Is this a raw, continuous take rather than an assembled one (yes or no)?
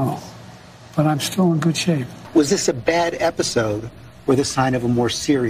no